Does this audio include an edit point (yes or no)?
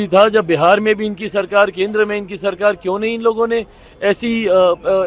no